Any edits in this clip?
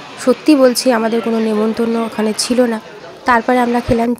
no; 0 cuts

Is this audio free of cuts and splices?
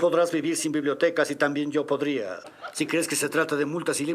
no; 1 cut; at 2.4 s

